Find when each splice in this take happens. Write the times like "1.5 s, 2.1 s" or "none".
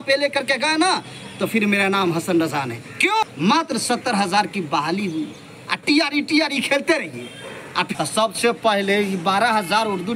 3.2 s, 7.9 s